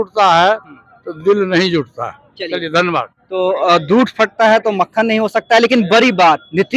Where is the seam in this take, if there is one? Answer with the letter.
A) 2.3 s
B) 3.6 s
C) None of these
C